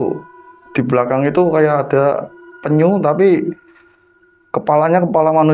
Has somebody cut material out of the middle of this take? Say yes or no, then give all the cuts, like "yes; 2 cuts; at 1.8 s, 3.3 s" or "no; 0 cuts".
no; 0 cuts